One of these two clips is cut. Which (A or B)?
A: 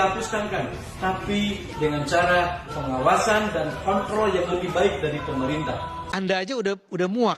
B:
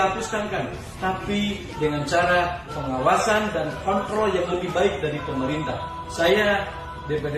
A